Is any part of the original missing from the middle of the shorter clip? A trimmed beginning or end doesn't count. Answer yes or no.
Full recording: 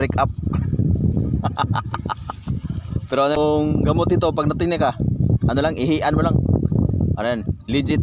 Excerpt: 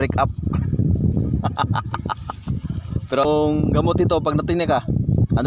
yes